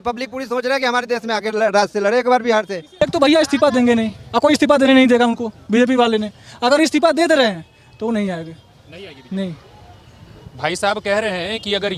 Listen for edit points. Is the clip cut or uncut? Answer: cut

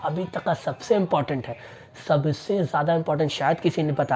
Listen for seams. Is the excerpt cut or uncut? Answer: uncut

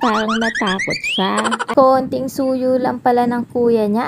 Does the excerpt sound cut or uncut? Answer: cut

